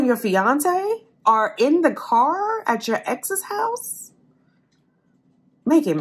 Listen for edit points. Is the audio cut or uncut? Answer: uncut